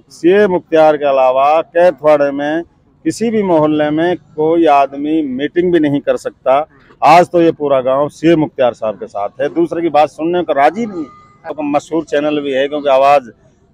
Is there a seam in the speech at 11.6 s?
yes; 1 cut; at 11.6 s

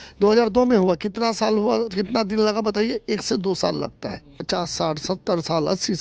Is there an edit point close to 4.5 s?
yes; 1 cut; at 4.5 s

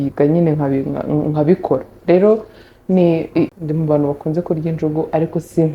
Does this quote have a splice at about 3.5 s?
yes; 1 cut; at 3.5 s

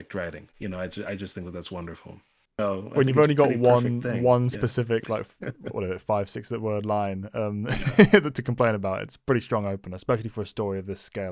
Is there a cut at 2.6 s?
yes; 1 cut; at 2.6 s

